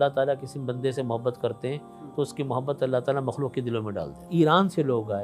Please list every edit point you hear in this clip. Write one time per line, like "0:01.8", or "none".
0:04.2